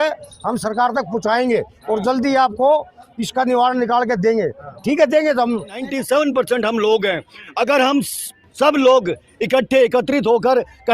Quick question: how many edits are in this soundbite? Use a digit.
1